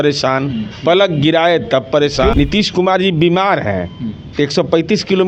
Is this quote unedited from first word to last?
no; 1 cut; at 2.3 s

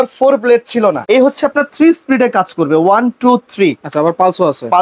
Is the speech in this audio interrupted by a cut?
yes; 1 cut; at 1.0 s

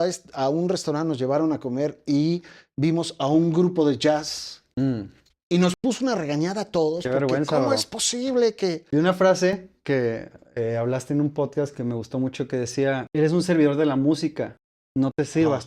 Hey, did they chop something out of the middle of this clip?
yes; 2 cuts; at 8.8 s, 13.1 s

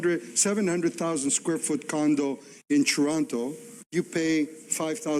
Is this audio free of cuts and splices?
no; 1 cut; at 3.8 s

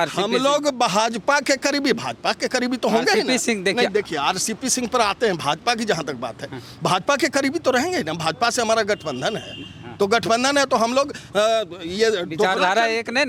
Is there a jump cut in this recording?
no; 0 cuts

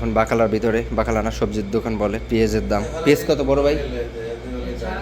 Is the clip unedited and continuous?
yes; 0 cuts

